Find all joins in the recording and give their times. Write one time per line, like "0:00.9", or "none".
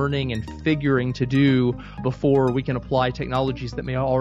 0:02.0